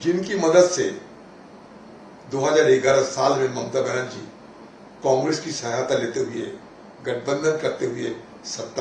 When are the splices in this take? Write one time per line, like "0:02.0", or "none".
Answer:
none